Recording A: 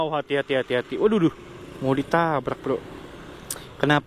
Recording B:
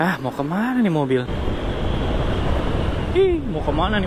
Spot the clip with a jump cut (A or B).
B